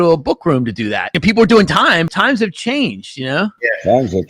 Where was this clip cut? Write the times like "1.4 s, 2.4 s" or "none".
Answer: 1.1 s, 2.1 s